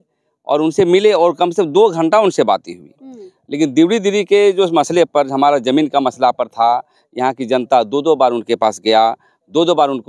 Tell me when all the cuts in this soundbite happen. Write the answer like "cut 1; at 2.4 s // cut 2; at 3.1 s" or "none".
none